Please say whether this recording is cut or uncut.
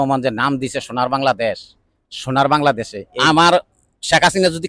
cut